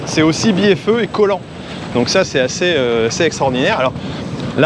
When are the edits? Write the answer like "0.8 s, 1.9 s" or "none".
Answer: none